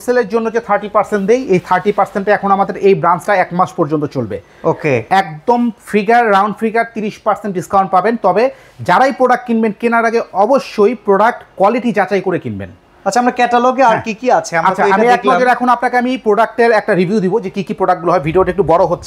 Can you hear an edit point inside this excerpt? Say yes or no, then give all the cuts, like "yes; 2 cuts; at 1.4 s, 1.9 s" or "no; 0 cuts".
no; 0 cuts